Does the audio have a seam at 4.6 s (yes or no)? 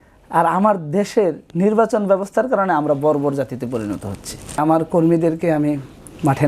yes